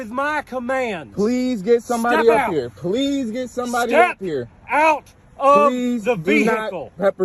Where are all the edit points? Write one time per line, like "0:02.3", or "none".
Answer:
none